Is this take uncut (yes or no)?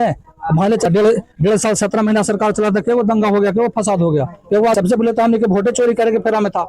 no